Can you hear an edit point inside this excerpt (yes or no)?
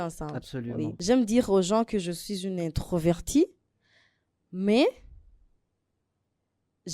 yes